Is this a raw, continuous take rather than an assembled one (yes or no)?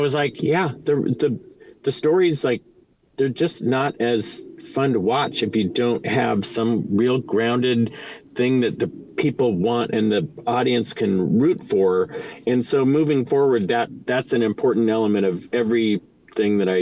no